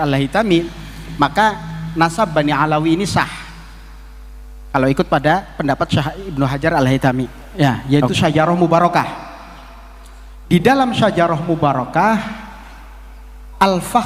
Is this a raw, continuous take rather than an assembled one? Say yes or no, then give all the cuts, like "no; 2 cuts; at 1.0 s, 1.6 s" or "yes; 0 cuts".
no; 1 cut; at 7.4 s